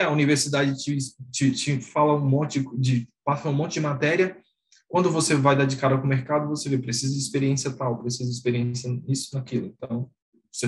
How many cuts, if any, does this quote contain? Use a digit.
0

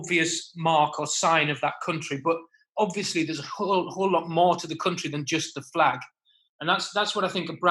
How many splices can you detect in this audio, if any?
0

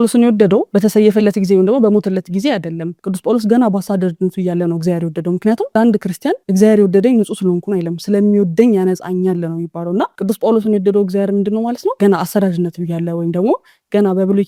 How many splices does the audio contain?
0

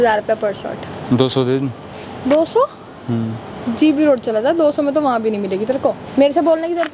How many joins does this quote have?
2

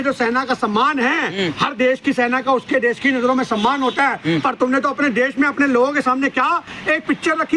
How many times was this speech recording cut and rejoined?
0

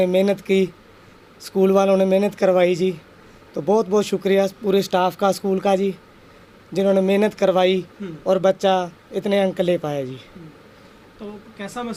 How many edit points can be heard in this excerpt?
0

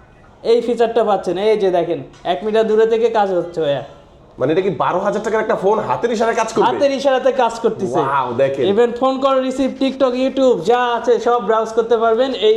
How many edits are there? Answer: 0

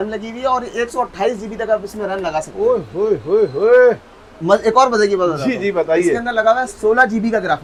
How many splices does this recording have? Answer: 0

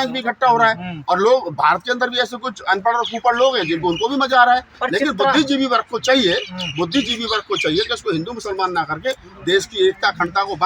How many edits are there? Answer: 0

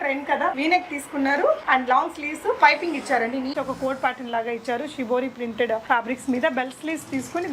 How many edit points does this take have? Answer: 2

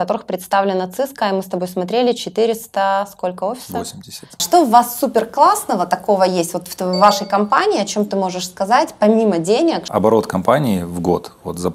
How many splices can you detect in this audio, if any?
2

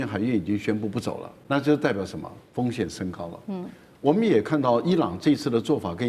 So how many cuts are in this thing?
1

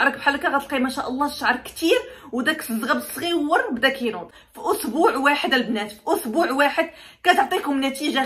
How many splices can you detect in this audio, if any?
1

